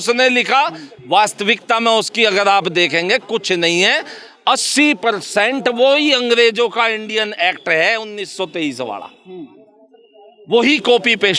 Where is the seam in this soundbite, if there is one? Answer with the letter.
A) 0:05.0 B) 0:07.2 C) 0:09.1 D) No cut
D